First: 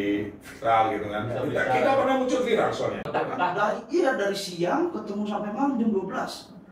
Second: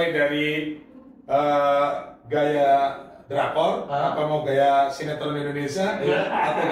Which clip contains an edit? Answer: first; 1 cut; at 3.0 s

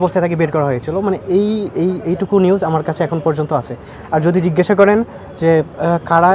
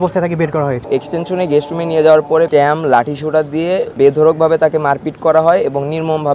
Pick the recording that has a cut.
second; 3 cuts; at 0.8 s, 2.5 s, 3.9 s

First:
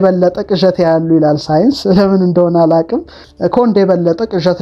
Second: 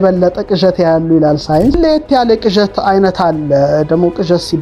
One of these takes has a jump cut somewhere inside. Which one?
second; 1 cut; at 1.8 s

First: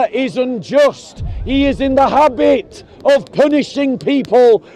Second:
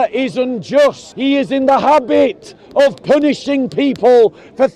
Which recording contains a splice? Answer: second; 1 cut; at 1.1 s

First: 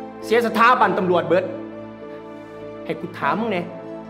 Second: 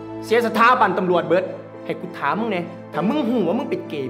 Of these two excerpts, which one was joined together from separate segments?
second; 2 cuts; at 1.7 s, 2.8 s

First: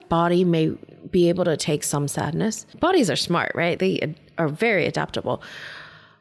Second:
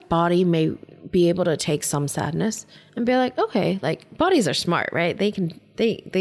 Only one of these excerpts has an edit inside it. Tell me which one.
first; 2 cuts; at 2.7 s, 3.8 s

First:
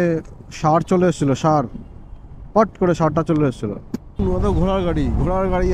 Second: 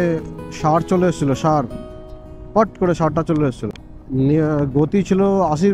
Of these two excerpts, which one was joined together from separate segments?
first; 1 cut; at 4.0 s

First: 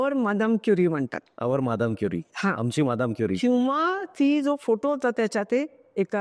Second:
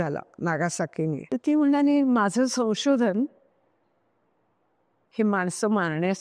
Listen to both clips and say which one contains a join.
second; 1 cut; at 1.2 s

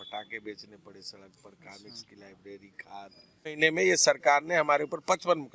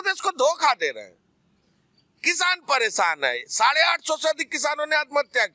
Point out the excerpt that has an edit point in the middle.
first; 1 cut; at 3.5 s

